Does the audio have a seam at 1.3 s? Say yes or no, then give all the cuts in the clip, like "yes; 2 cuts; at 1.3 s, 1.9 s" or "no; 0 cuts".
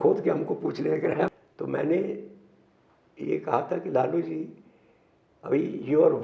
yes; 1 cut; at 1.3 s